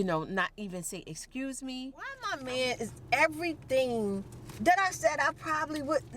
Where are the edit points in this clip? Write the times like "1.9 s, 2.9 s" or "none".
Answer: 2.3 s

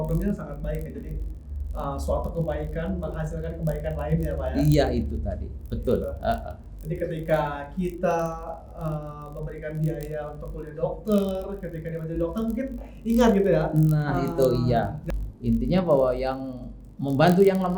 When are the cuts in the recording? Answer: 15.0 s

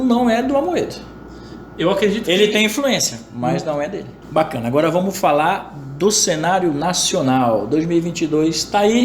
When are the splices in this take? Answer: 4.1 s

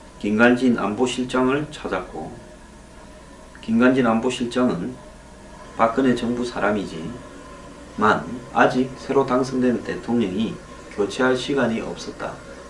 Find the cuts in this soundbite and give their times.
9.7 s

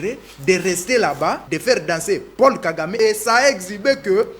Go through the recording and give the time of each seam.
1.5 s, 3.0 s

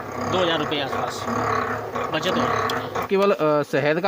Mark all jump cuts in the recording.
3.0 s

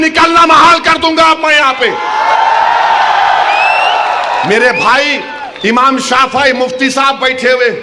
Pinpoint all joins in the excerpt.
none

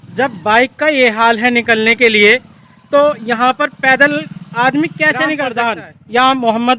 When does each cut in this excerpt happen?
5.5 s

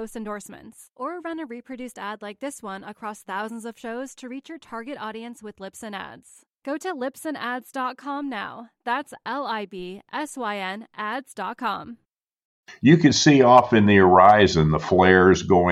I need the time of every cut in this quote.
12.7 s

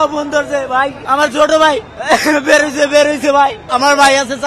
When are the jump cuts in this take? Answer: 1.0 s, 1.9 s, 3.6 s

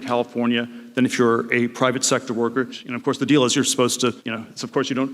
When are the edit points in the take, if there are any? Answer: none

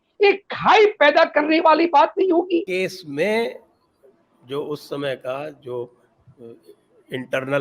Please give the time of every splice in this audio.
2.7 s

